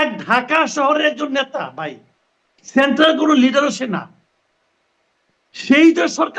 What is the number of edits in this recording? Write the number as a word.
zero